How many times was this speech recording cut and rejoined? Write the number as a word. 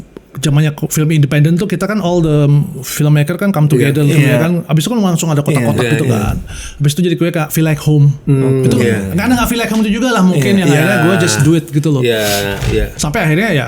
zero